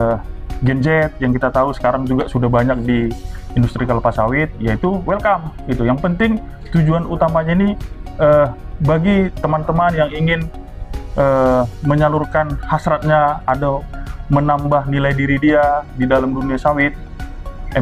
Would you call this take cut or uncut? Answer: uncut